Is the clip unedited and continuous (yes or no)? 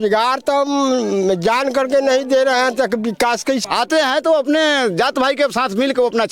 no